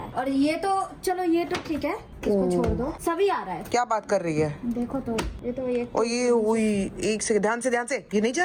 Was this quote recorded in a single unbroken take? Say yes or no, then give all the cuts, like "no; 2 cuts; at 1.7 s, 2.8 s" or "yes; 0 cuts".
yes; 0 cuts